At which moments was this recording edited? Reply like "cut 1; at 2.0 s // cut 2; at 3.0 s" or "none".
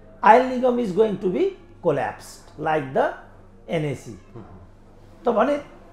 none

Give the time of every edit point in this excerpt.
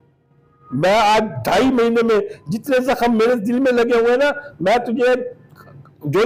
none

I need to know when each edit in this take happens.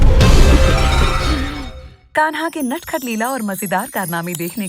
cut 1; at 1.6 s

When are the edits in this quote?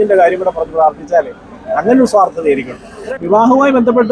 cut 1; at 3.1 s

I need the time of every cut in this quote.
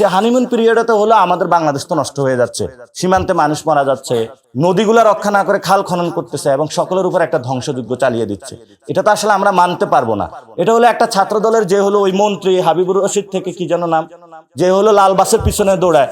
cut 1; at 4.4 s

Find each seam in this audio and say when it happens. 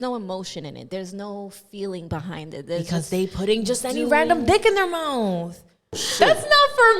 cut 1; at 6.0 s

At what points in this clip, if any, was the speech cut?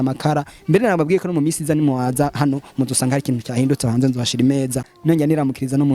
cut 1; at 4.9 s

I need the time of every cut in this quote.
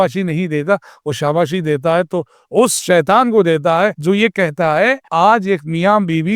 cut 1; at 4.0 s // cut 2; at 5.0 s

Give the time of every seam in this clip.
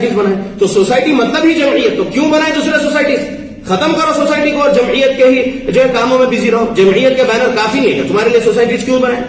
none

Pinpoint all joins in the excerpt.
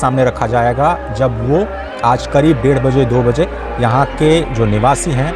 none

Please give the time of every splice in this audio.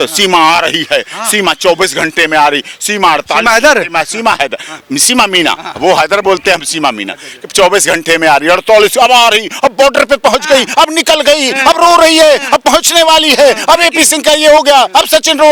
none

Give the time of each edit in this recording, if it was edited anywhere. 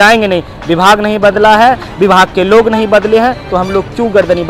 none

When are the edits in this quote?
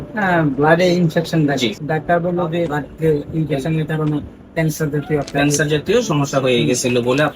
cut 1; at 1.8 s // cut 2; at 2.8 s

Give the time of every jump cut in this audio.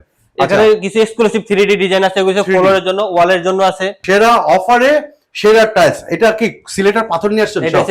cut 1; at 4.0 s

